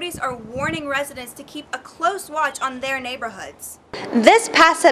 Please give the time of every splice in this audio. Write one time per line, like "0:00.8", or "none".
0:03.9